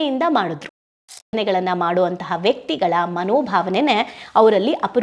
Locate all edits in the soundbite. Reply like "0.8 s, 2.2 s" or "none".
1.3 s